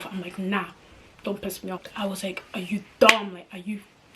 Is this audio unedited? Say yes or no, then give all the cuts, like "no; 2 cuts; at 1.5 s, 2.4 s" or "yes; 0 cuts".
no; 1 cut; at 1.9 s